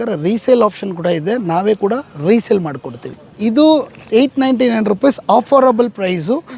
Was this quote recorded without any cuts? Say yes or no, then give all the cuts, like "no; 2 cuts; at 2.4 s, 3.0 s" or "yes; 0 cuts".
no; 1 cut; at 3.0 s